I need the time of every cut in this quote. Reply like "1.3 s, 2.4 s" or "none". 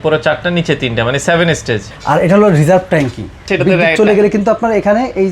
1.9 s, 3.5 s